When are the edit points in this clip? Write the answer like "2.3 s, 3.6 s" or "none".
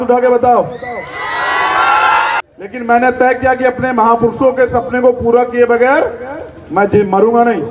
2.4 s